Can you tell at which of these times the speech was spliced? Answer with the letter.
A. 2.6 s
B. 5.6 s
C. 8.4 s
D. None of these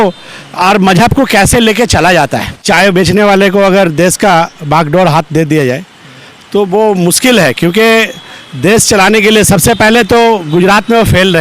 A